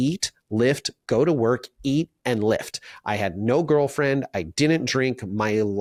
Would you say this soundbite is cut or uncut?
uncut